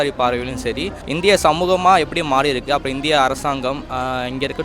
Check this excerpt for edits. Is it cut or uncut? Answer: cut